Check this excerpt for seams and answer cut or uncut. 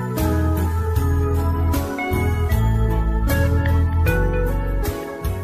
uncut